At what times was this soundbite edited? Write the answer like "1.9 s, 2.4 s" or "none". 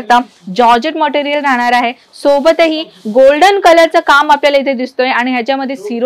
none